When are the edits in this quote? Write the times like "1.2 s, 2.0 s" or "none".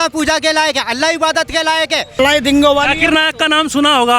2.1 s